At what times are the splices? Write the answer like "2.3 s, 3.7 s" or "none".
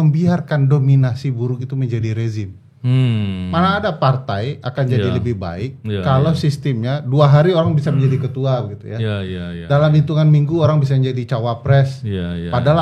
none